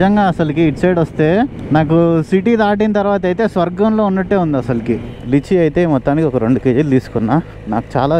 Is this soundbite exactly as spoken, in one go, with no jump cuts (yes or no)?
no